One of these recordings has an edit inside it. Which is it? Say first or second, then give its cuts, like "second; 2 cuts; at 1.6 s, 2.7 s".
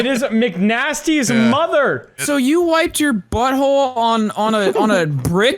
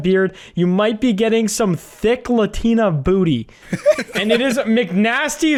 first; 1 cut; at 2.2 s